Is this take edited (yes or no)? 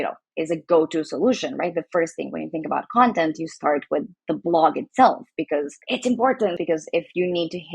yes